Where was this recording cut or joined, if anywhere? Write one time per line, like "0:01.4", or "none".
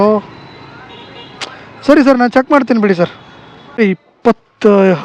0:03.8